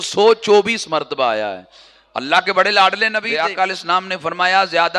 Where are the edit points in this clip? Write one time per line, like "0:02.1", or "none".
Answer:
0:03.2